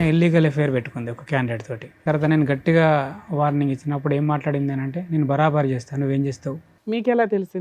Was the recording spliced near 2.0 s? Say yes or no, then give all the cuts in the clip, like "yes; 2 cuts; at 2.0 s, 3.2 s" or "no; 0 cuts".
yes; 2 cuts; at 2.0 s, 6.7 s